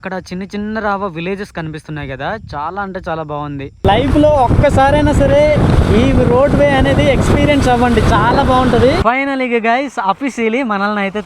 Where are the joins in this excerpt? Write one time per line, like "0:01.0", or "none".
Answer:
0:03.8
0:09.0